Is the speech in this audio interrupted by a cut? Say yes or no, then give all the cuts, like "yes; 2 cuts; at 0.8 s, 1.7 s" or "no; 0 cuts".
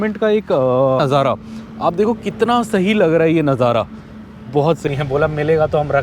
yes; 2 cuts; at 1.0 s, 4.9 s